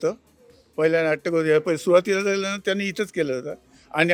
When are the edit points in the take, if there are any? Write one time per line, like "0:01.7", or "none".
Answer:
none